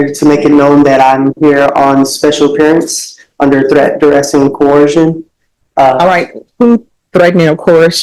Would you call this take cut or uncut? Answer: uncut